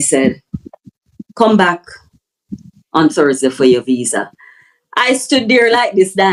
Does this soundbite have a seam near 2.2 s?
no; 0 cuts

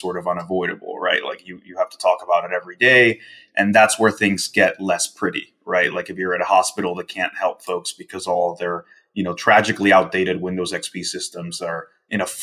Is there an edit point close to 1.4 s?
no; 0 cuts

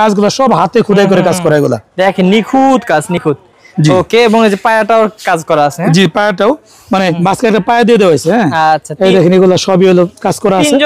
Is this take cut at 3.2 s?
no; 0 cuts

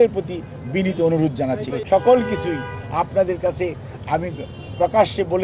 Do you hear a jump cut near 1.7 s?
yes; 1 cut; at 1.7 s

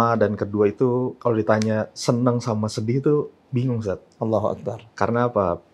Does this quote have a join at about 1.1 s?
yes; 1 cut; at 1.1 s

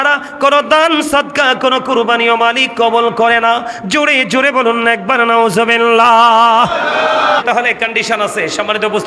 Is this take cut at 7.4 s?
yes; 1 cut; at 7.4 s

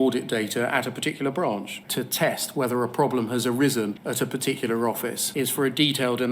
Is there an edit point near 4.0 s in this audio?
yes; 3 cuts; at 1.8 s, 4.0 s, 5.2 s

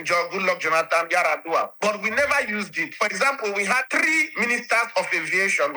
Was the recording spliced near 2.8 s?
yes; 2 cuts; at 2.8 s, 3.9 s

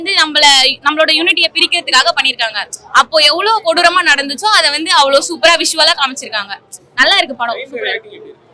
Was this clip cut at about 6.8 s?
no; 0 cuts

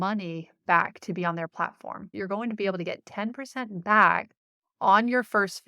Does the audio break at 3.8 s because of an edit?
no; 1 cut; at 2.1 s

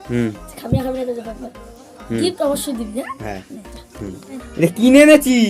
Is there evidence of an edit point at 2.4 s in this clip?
no; 1 cut; at 4.4 s

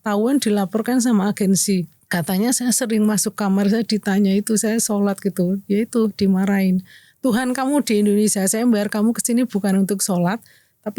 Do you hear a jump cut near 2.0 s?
yes; 1 cut; at 2.0 s

